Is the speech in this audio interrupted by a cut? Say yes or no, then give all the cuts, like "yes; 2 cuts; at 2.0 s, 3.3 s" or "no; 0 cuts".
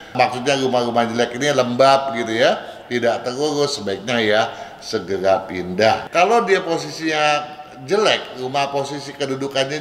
yes; 1 cut; at 6.1 s